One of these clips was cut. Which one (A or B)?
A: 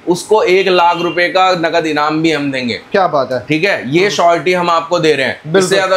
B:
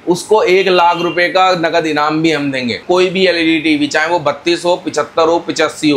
B